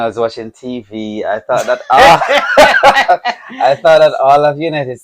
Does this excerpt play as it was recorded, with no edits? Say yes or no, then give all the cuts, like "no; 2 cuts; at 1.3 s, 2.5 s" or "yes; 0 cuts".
yes; 0 cuts